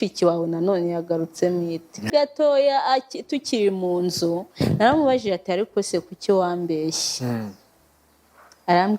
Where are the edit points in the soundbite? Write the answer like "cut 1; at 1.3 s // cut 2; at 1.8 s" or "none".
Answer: cut 1; at 2.1 s